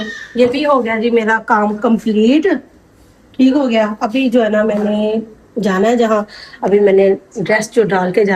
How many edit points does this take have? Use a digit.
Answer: 0